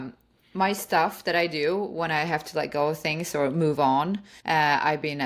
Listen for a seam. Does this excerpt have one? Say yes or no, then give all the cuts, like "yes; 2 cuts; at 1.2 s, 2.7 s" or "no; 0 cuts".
yes; 1 cut; at 4.3 s